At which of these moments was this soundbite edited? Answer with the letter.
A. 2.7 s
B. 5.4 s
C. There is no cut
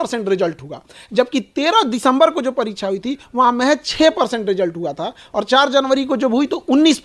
C